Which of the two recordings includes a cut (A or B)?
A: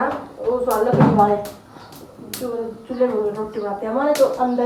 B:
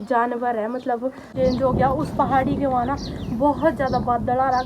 B